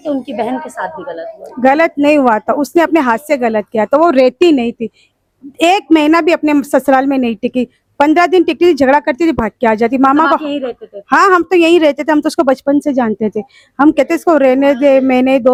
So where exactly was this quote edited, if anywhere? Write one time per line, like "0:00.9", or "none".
none